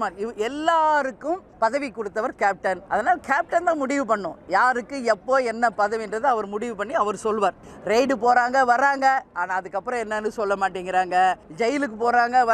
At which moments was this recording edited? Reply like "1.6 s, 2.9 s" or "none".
1.5 s, 2.8 s, 7.7 s, 11.5 s

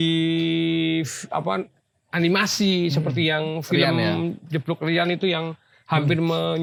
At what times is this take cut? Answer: none

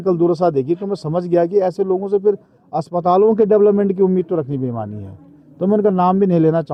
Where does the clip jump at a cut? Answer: none

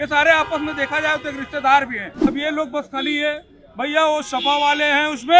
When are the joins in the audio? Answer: 2.3 s

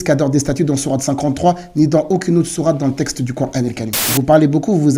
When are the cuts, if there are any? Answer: 3.9 s

